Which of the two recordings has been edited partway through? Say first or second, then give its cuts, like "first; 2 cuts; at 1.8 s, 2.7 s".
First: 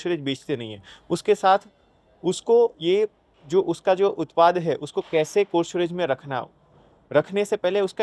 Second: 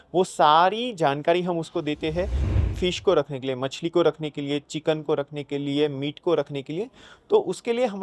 second; 1 cut; at 2.4 s